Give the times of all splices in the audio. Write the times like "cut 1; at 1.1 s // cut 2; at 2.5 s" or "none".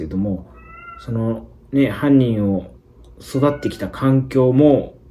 none